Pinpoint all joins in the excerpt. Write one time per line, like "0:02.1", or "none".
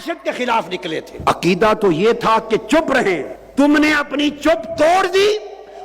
0:01.1
0:03.4